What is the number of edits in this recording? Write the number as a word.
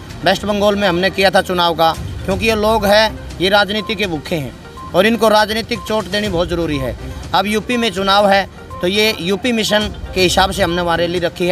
zero